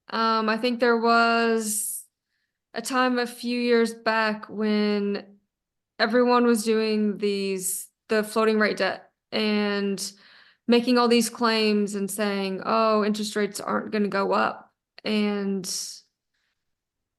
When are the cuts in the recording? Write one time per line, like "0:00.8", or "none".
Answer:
none